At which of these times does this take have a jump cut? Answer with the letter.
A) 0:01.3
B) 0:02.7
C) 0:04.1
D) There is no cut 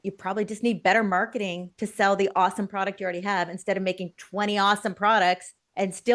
D